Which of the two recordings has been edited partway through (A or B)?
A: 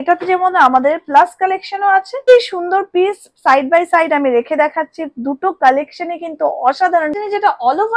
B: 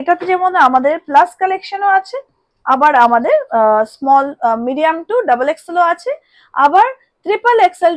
A